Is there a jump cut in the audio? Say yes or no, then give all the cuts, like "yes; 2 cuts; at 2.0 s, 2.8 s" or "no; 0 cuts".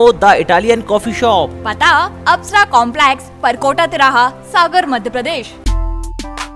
yes; 1 cut; at 5.5 s